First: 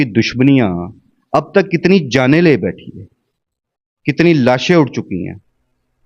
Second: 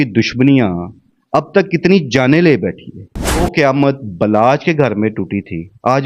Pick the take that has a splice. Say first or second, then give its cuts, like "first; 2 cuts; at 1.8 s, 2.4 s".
second; 1 cut; at 3.4 s